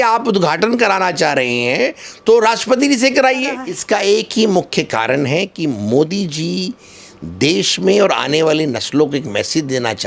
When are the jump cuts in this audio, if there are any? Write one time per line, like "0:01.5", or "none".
0:03.7